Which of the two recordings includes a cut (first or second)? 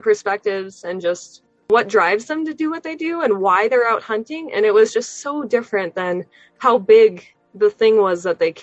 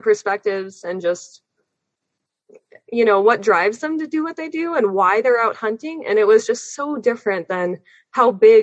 first